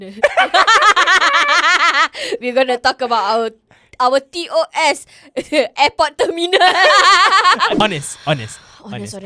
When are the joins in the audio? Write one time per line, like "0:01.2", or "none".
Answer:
0:07.8

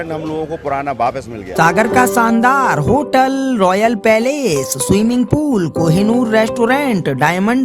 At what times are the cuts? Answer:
0:01.4

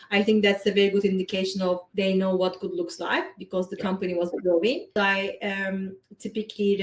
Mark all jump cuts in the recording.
0:01.9
0:04.9

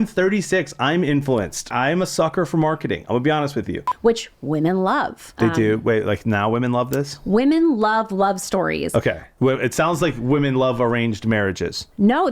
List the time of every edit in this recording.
0:01.7
0:03.8
0:05.3

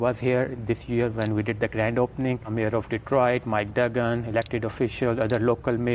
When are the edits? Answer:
none

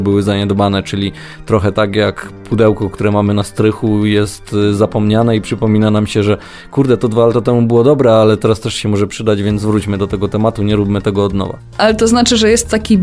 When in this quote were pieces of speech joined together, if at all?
none

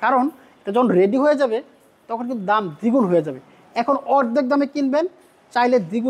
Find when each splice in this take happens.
none

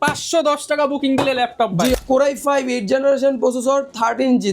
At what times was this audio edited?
0:02.0

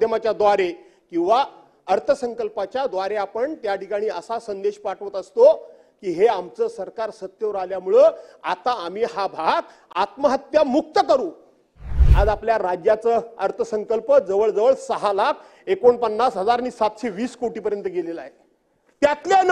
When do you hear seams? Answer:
0:12.0

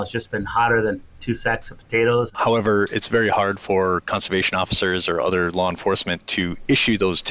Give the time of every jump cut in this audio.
0:02.3

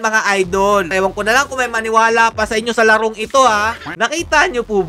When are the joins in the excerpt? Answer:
0:00.9
0:03.9

